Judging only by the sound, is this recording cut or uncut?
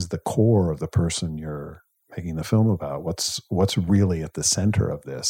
uncut